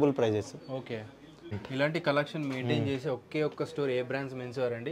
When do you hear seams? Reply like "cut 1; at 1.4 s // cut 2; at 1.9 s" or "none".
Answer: cut 1; at 1.6 s